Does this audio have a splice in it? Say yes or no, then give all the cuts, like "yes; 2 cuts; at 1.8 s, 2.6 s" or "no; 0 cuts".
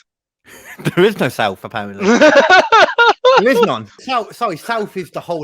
yes; 1 cut; at 4.0 s